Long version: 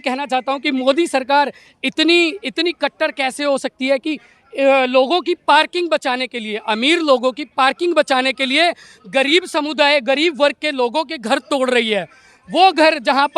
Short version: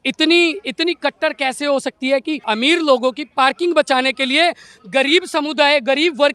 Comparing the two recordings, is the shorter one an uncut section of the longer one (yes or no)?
no